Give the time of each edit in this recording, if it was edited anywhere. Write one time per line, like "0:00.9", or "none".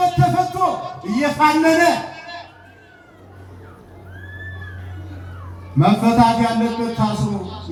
none